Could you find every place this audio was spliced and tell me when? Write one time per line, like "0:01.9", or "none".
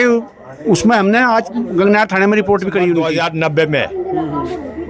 0:03.1

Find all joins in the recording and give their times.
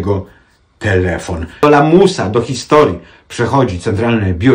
0:01.6

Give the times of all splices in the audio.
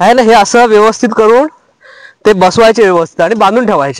none

